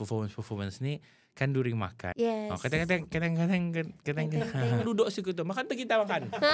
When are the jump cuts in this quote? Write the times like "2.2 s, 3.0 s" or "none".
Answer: 2.0 s, 4.8 s